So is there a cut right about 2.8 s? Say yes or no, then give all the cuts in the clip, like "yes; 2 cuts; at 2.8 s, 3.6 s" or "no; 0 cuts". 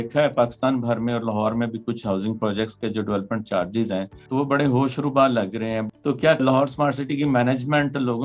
no; 2 cuts; at 4.2 s, 6.4 s